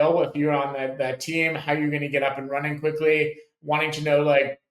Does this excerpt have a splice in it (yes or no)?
no